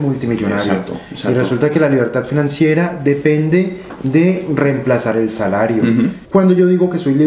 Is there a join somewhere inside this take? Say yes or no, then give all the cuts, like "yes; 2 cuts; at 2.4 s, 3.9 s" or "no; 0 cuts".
yes; 1 cut; at 6.2 s